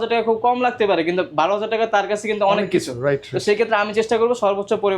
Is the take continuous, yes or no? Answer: yes